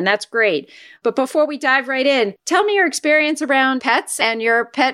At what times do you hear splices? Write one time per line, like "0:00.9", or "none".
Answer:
0:00.9
0:02.4
0:03.9

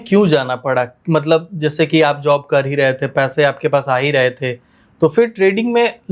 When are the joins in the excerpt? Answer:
none

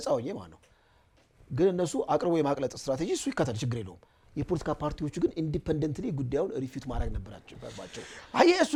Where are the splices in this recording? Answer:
none

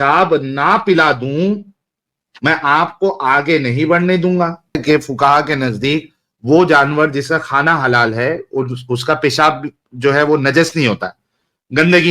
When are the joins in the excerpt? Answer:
0:04.8

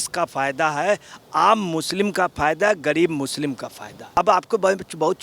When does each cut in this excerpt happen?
0:04.1

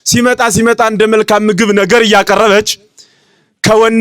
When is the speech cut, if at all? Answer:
none

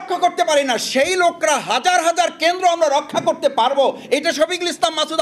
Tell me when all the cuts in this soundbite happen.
none

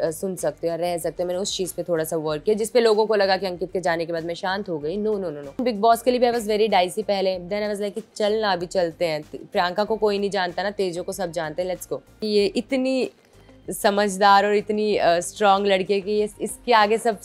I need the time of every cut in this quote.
0:05.6
0:12.2

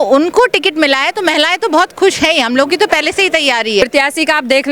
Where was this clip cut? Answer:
0:03.8

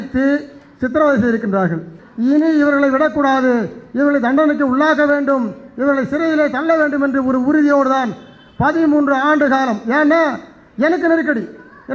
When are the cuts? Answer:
0:02.0

